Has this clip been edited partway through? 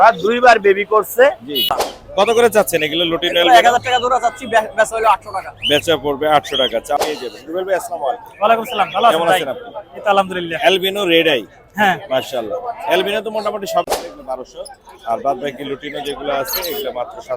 yes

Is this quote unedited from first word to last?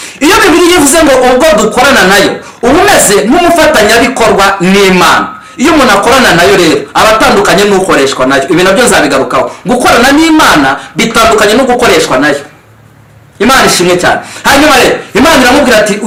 yes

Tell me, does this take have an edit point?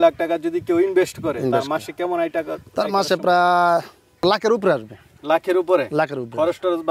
yes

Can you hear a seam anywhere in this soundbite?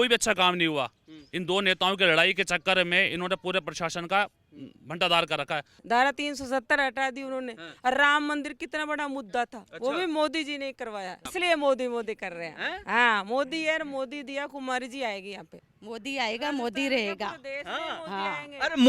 yes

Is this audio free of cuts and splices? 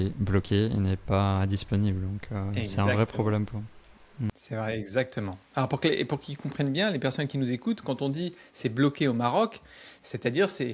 yes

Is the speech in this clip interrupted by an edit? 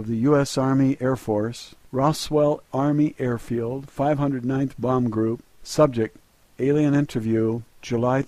yes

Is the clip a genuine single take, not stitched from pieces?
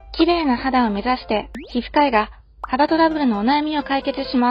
yes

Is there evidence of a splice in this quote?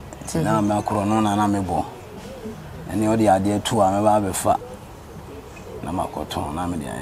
no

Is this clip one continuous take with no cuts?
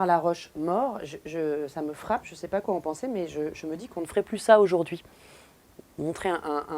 yes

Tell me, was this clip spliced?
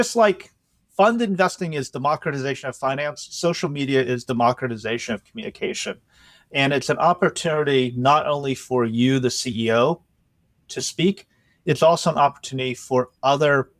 no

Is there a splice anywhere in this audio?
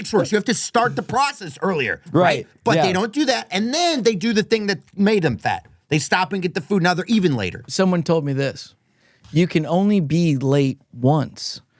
yes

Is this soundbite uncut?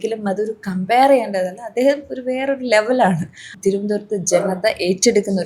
no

